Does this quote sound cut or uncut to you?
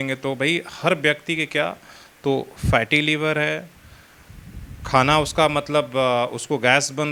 uncut